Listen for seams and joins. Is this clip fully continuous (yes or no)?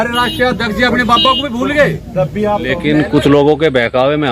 no